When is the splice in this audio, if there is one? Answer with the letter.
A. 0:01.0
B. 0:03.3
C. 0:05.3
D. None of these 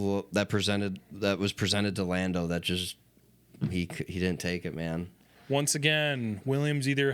C